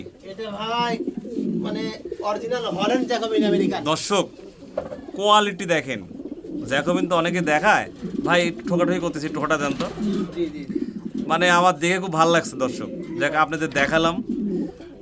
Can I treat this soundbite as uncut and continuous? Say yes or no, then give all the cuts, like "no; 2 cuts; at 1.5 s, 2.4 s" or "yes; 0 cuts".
yes; 0 cuts